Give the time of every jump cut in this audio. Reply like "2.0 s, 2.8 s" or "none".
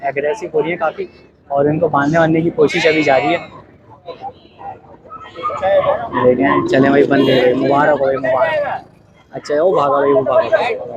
none